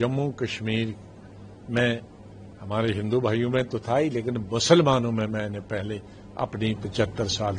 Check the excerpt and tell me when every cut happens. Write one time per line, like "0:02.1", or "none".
none